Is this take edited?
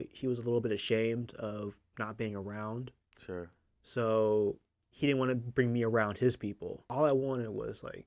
yes; 1 cut; at 6.8 s

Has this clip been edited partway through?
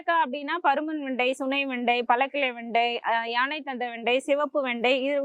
no; 0 cuts

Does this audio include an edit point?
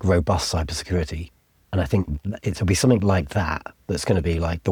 no; 0 cuts

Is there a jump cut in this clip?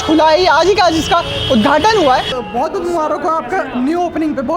yes; 1 cut; at 2.3 s

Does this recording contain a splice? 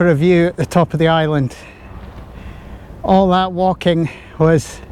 no; 0 cuts

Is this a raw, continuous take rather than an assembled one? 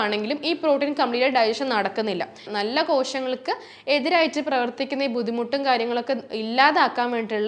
no; 1 cut; at 2.4 s

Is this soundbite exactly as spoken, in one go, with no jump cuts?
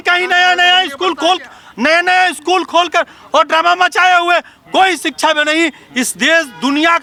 yes; 0 cuts

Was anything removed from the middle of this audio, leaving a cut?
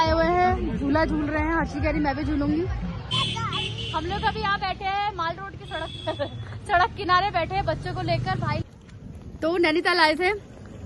yes; 2 cuts; at 3.1 s, 8.6 s

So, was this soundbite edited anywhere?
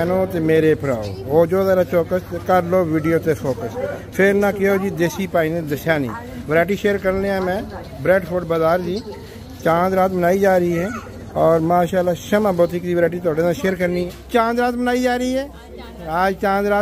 yes; 1 cut; at 14.2 s

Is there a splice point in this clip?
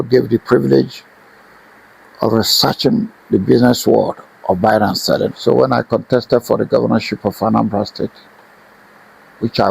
yes; 1 cut; at 5.4 s

